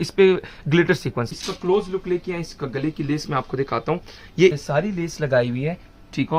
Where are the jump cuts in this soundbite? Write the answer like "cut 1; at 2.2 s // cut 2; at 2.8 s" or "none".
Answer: cut 1; at 1.3 s // cut 2; at 4.6 s